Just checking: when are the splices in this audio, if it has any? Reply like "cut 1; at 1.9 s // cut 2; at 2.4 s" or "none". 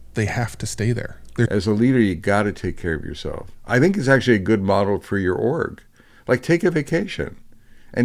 cut 1; at 1.5 s